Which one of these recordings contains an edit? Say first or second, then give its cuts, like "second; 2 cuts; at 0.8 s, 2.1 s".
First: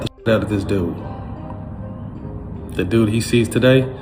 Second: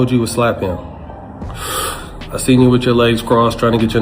second; 1 cut; at 1.4 s